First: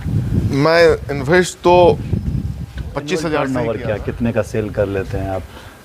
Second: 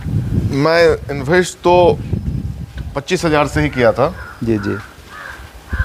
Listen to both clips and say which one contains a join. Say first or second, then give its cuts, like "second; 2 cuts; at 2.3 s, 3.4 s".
first; 1 cut; at 3.5 s